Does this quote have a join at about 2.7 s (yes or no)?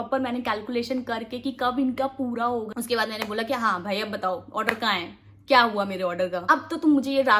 yes